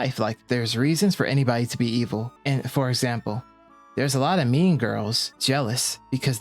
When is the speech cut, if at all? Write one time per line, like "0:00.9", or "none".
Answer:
0:05.3